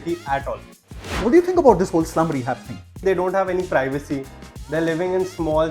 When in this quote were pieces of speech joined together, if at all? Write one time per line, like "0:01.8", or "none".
0:01.1
0:03.0